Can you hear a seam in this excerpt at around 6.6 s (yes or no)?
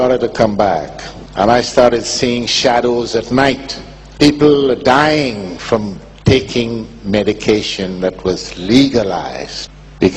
yes